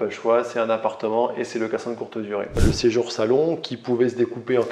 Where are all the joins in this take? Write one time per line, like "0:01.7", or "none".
0:02.6